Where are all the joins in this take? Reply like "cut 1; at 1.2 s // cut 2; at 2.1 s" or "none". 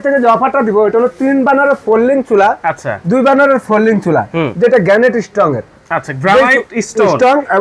none